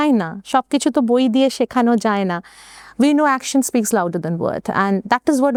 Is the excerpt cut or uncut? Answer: uncut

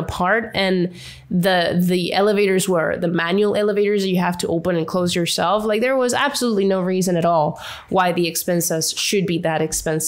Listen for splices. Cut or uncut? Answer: uncut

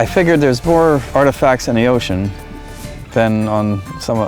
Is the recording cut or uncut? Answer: cut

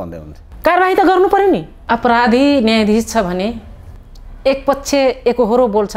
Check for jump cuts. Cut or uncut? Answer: cut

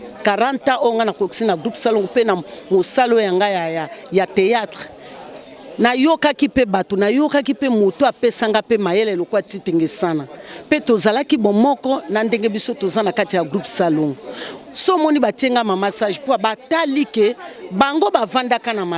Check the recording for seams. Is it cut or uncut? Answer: uncut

